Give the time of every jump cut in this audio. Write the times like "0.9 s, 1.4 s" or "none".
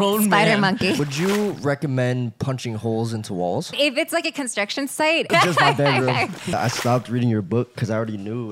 1.0 s, 3.7 s, 5.3 s, 6.5 s